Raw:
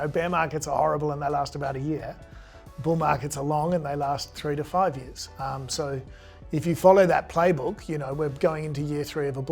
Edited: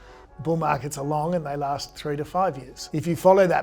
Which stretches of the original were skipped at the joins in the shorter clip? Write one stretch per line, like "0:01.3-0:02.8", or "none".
0:05.1-0:06.3